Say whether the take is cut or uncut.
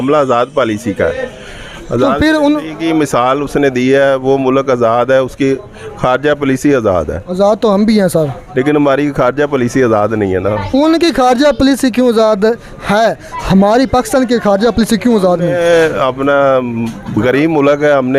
uncut